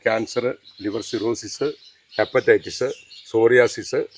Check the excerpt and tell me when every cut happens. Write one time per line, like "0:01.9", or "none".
none